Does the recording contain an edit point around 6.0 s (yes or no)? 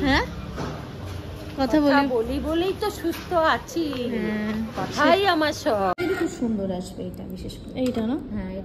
yes